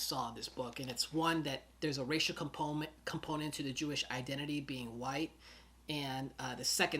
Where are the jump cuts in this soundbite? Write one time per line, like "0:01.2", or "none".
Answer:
0:01.7